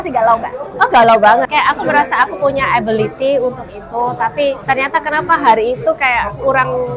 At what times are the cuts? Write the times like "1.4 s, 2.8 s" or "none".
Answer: 1.4 s, 4.6 s